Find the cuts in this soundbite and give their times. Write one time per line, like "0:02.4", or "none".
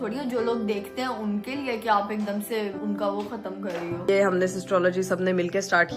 0:02.8
0:04.1